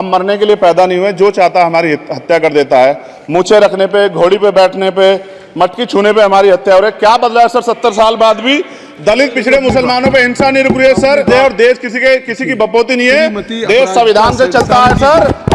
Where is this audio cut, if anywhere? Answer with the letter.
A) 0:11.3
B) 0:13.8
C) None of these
A